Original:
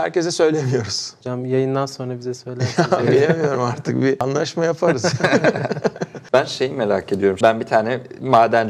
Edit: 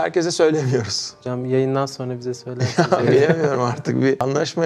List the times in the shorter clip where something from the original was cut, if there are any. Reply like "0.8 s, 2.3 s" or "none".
none